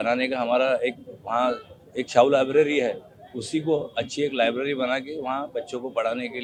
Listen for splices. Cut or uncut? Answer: uncut